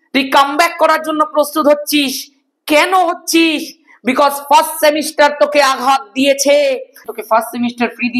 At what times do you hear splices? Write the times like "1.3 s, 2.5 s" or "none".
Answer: 7.0 s